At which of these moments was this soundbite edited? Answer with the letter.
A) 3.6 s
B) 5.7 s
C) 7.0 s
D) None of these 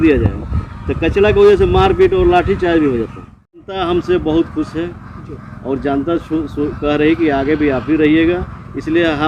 A